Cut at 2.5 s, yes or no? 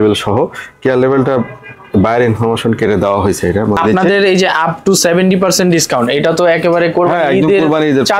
no